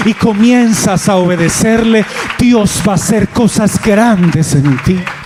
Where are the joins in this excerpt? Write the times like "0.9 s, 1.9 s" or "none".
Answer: none